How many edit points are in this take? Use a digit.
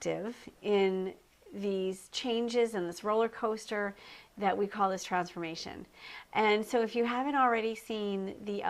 0